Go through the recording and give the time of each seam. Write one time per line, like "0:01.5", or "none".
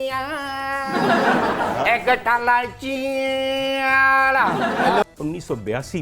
0:05.0